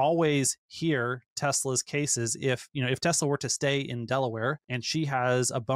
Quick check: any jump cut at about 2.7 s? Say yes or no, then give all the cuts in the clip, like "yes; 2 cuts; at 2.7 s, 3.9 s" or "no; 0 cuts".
no; 1 cut; at 4.7 s